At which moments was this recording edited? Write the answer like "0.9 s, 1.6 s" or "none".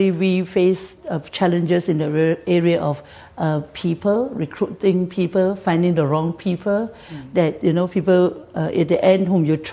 none